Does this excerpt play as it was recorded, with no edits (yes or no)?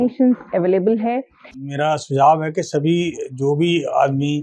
no